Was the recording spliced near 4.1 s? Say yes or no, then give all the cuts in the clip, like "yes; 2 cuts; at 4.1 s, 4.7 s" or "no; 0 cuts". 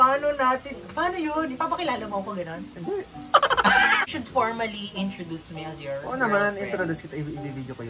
yes; 1 cut; at 4.1 s